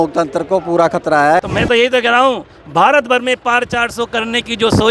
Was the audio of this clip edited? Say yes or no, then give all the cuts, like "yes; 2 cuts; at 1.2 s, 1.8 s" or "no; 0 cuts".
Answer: yes; 1 cut; at 1.4 s